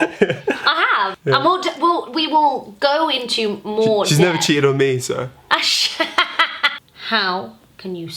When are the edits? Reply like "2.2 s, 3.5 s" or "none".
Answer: 1.2 s, 6.8 s